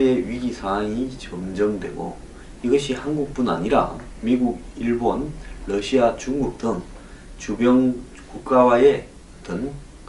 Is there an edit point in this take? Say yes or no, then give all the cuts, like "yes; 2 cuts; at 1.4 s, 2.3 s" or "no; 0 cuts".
yes; 1 cut; at 1.8 s